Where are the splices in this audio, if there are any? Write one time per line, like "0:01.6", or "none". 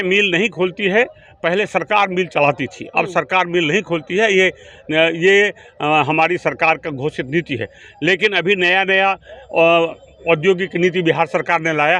none